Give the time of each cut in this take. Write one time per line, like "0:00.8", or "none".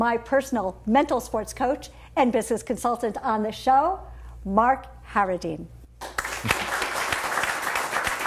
0:02.9